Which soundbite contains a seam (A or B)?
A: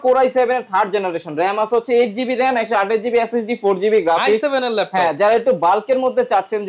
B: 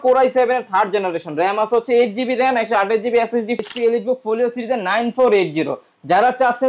B